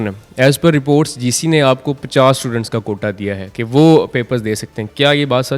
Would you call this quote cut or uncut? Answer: uncut